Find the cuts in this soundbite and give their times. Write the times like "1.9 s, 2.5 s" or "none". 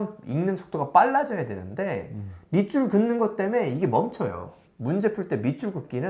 4.5 s